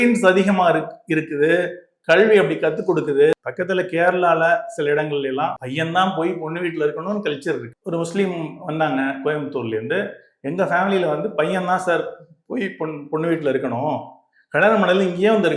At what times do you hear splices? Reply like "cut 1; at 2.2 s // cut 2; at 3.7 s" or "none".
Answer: cut 1; at 3.5 s // cut 2; at 5.6 s // cut 3; at 7.7 s